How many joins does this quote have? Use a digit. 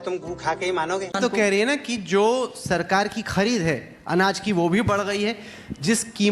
1